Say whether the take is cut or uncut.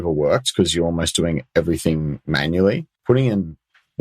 cut